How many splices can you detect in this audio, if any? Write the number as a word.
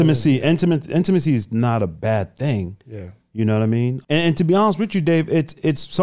one